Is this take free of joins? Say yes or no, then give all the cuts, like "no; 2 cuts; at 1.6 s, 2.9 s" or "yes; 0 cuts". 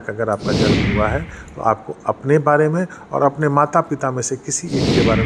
yes; 0 cuts